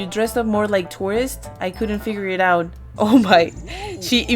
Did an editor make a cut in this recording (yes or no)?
yes